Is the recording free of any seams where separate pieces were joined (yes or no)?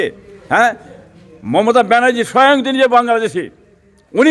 yes